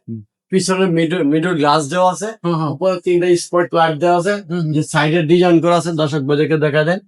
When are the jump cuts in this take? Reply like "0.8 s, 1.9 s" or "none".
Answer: none